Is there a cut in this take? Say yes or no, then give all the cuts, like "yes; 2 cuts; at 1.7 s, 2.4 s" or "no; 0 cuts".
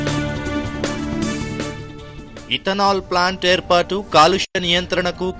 yes; 1 cut; at 1.1 s